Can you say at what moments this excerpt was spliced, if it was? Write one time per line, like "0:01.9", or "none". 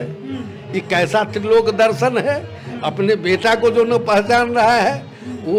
none